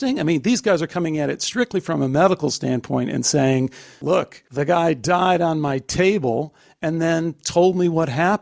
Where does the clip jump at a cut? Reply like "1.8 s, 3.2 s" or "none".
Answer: 4.0 s